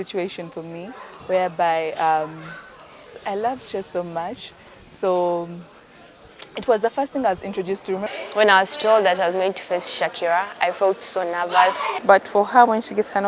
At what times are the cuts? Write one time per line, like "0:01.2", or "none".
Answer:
0:08.1
0:12.0